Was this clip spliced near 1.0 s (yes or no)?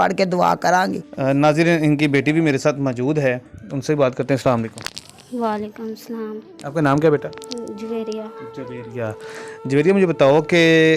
no